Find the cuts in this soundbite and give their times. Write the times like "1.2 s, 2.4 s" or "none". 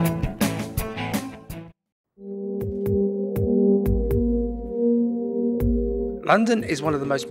none